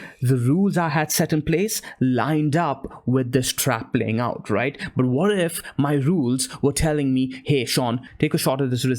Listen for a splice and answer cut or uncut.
cut